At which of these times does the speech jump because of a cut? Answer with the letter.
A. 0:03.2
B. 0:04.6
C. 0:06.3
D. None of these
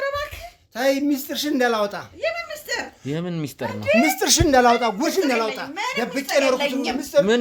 D